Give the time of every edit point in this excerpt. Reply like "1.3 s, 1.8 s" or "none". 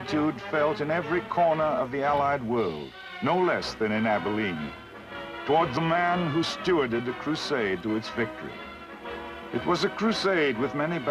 4.3 s